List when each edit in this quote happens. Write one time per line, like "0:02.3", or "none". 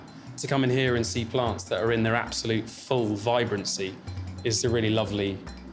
none